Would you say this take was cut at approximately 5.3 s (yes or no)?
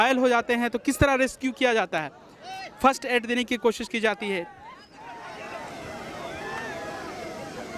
yes